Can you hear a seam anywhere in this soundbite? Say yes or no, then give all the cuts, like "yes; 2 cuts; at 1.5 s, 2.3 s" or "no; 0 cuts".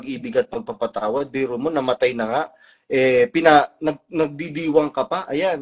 no; 0 cuts